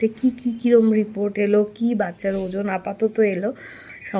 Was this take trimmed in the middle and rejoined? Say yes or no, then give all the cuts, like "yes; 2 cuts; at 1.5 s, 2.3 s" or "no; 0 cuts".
no; 0 cuts